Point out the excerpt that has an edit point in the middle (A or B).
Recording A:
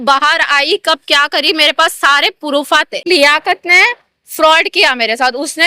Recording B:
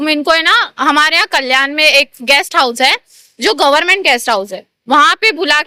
A